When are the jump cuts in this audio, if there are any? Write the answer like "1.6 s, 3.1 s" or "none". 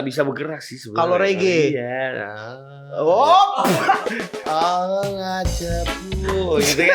4.0 s